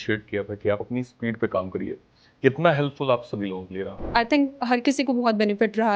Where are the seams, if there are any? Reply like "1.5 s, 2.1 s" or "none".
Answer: 4.1 s